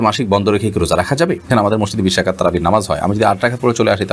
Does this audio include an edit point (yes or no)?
yes